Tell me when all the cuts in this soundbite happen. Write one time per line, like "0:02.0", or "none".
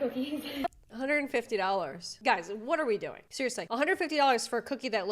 0:02.0